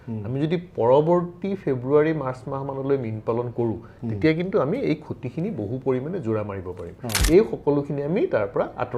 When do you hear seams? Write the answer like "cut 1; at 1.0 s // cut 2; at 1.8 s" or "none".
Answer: cut 1; at 7.1 s